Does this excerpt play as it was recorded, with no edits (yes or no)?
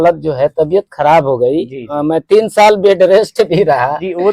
yes